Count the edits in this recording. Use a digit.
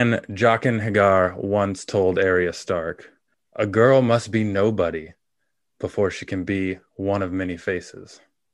0